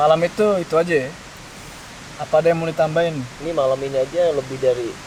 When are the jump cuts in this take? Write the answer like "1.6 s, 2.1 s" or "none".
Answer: none